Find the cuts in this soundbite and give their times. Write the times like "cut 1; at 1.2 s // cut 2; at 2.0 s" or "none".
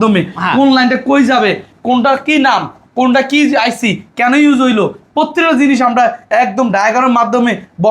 none